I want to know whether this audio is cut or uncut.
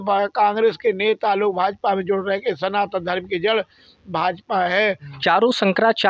cut